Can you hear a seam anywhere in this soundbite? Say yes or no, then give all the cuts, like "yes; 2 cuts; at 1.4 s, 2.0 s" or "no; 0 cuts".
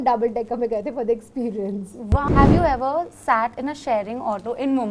yes; 1 cut; at 2.3 s